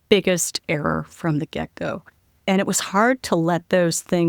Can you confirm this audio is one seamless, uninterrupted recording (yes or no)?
yes